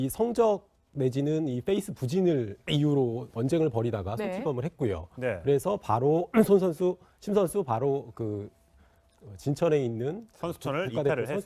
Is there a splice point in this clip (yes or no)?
yes